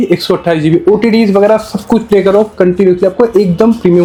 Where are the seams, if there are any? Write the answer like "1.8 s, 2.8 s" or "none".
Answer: none